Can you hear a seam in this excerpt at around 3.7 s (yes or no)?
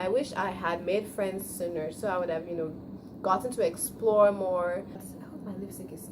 no